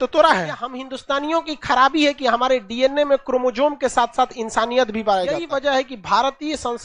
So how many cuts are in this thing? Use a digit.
2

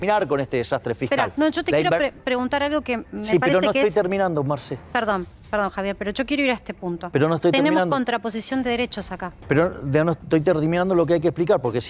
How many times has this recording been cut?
0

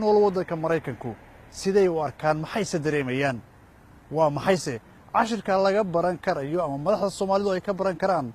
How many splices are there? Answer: 0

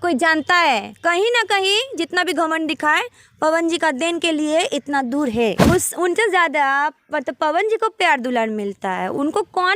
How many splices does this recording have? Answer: 1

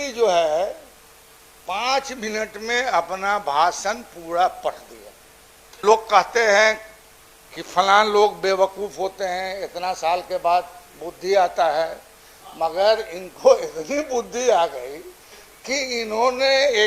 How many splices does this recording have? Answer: 1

